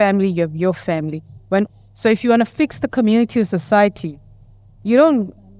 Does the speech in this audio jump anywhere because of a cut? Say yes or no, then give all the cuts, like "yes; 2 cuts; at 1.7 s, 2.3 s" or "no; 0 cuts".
yes; 1 cut; at 1.7 s